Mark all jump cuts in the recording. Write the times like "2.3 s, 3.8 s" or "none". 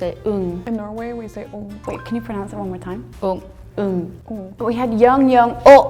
1.8 s, 4.5 s